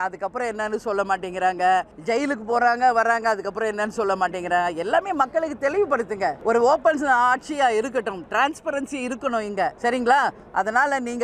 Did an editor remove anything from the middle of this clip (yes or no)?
yes